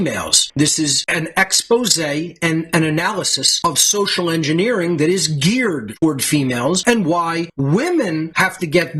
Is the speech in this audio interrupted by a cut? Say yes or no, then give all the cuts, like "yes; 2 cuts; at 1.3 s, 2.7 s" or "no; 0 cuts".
no; 0 cuts